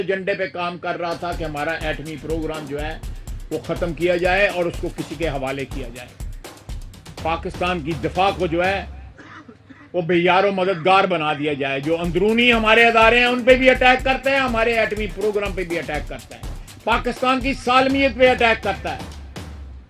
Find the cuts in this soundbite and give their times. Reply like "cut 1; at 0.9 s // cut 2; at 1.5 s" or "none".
cut 1; at 19.0 s